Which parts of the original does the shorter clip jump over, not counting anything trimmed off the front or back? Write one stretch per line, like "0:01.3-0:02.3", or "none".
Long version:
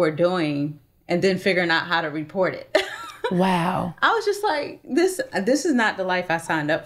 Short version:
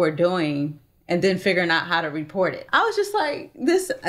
0:02.6-0:03.9